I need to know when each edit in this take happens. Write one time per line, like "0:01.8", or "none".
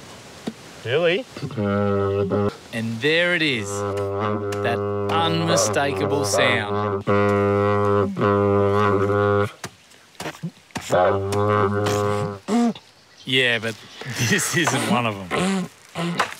0:02.5